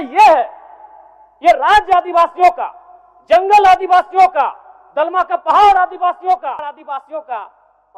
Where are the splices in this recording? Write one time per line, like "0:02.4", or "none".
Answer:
0:06.6